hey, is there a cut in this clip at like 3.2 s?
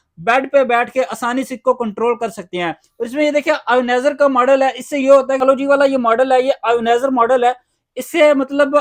no; 0 cuts

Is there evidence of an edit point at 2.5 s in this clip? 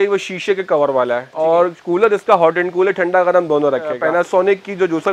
no; 2 cuts; at 1.3 s, 4.0 s

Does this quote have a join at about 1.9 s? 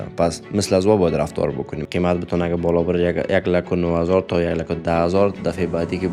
yes; 1 cut; at 1.9 s

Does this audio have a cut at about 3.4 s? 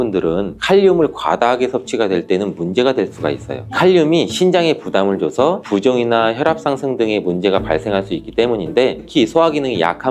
no; 1 cut; at 9.1 s

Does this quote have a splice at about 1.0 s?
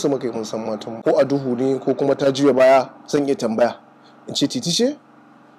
yes; 1 cut; at 1.0 s

